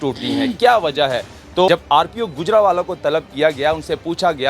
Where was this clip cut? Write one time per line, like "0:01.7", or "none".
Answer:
0:01.7